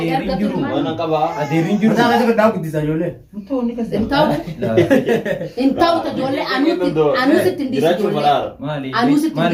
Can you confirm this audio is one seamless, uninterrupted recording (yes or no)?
yes